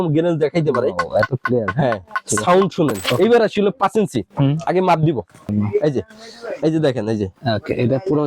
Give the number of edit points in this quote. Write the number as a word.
two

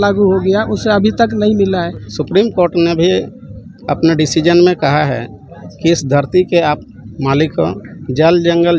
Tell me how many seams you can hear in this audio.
one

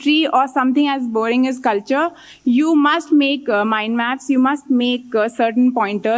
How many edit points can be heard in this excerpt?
zero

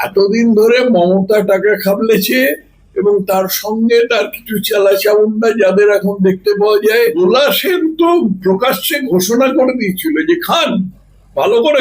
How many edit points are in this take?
one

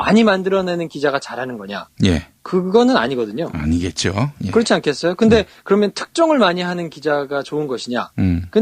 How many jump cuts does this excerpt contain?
one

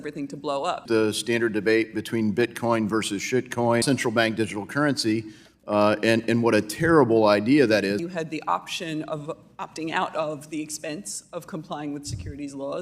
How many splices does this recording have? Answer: three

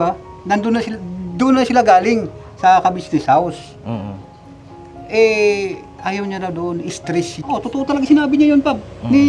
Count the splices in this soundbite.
one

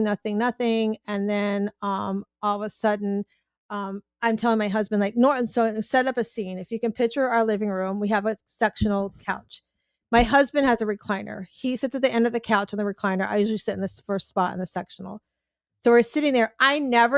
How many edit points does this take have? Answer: zero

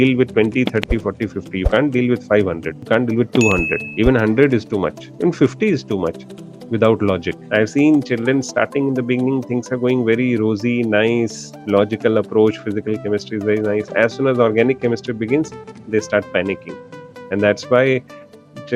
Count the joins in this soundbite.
three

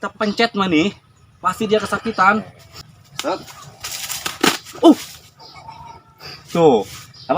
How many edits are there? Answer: one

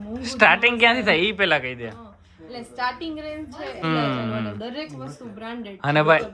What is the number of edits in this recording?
one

